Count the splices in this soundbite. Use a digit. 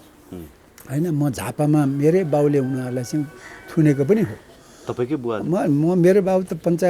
0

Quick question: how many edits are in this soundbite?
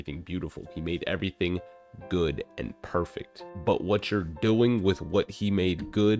0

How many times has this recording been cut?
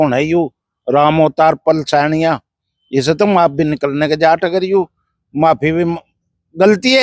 0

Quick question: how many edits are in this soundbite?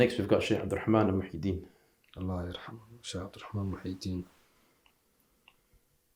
0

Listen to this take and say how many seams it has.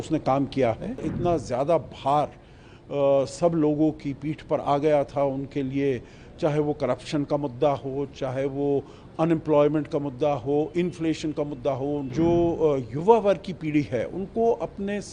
2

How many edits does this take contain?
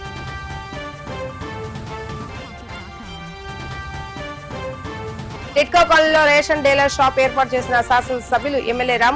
0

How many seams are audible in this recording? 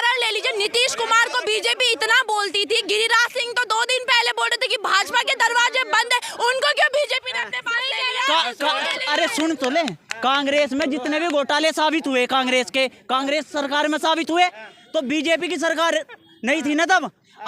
0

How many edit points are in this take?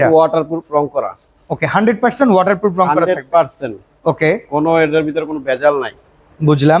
0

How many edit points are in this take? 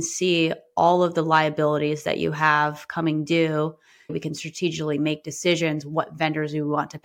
1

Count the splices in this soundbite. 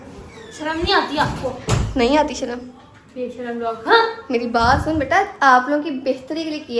0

